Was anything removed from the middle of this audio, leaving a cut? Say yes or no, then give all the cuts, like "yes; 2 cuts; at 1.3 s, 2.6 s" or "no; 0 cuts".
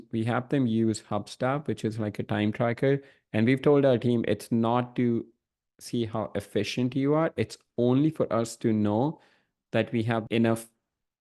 yes; 1 cut; at 10.2 s